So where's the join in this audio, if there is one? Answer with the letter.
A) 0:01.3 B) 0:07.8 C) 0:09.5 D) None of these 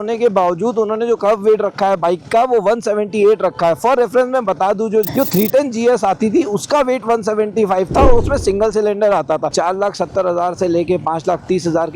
C